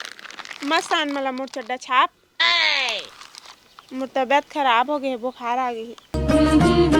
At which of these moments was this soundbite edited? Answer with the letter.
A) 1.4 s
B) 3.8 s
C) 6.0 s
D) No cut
C